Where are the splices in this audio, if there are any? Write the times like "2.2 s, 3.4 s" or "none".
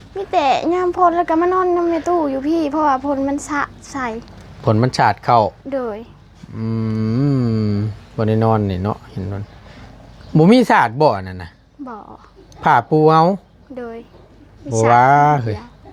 none